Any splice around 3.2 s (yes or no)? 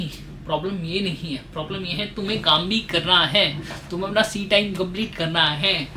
no